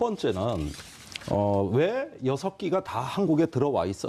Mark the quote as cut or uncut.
uncut